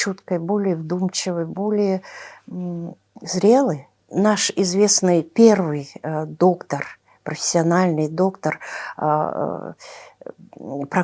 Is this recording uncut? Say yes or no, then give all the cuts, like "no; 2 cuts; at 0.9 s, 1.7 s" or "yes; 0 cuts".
no; 1 cut; at 4.0 s